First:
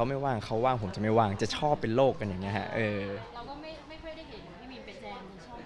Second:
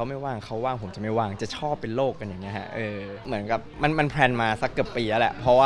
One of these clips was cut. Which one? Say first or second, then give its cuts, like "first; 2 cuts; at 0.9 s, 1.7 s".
second; 1 cut; at 3.2 s